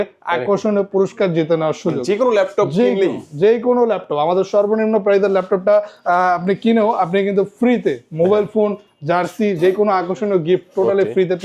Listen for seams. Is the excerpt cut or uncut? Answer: uncut